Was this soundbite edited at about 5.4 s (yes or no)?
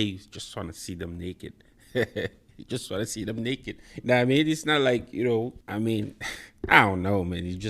no